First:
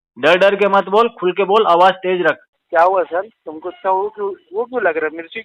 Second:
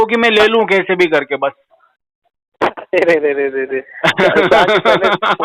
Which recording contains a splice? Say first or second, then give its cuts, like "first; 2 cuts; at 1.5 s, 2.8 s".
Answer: first; 1 cut; at 2.5 s